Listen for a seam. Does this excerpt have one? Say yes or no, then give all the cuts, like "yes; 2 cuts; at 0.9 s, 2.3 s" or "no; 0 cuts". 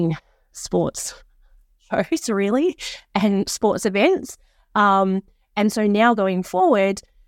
no; 0 cuts